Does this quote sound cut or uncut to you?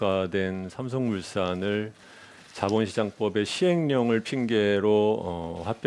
cut